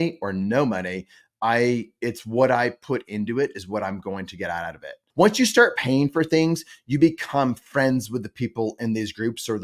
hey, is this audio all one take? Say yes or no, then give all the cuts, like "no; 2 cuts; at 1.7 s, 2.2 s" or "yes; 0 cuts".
no; 1 cut; at 5.0 s